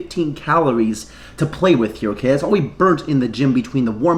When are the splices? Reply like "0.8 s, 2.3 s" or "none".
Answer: none